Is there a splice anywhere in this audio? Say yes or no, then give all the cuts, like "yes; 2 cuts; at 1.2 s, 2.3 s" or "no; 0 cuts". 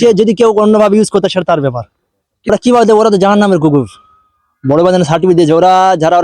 yes; 1 cut; at 2.5 s